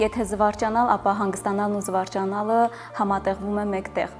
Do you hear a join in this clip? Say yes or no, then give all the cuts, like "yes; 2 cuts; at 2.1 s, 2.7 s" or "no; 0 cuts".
no; 0 cuts